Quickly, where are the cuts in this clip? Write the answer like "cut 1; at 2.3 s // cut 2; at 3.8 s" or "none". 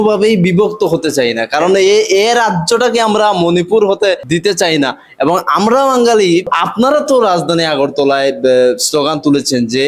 cut 1; at 4.2 s // cut 2; at 6.5 s

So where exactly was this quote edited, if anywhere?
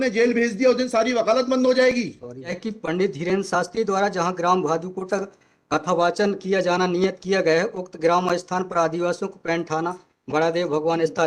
cut 1; at 2.6 s

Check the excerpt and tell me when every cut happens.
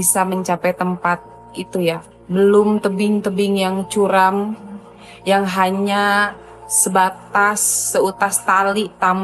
cut 1; at 2.1 s

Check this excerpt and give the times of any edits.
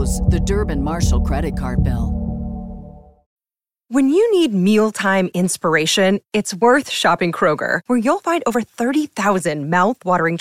cut 1; at 3.5 s

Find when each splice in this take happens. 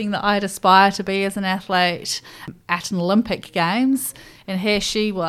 cut 1; at 2.5 s

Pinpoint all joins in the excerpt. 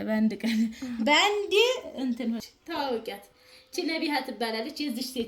cut 1; at 2.5 s

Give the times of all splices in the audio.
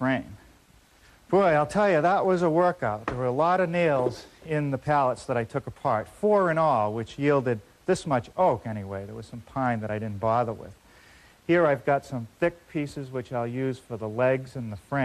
cut 1; at 2.7 s

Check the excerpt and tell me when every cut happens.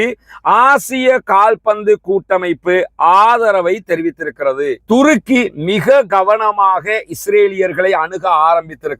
cut 1; at 4.8 s

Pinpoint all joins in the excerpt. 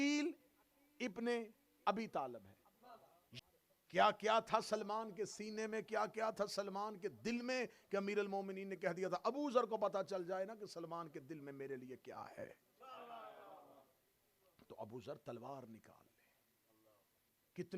cut 1; at 3.3 s

